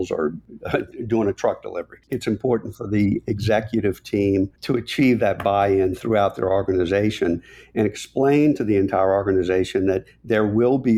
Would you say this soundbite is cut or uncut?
cut